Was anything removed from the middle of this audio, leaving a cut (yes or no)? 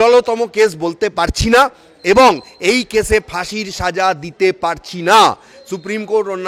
no